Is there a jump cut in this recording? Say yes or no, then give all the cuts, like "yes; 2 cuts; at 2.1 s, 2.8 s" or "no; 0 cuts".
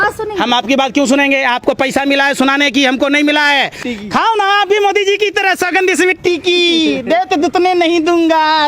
yes; 1 cut; at 3.9 s